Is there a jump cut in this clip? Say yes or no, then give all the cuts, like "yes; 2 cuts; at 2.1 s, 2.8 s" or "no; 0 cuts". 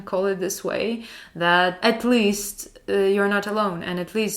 yes; 1 cut; at 1.8 s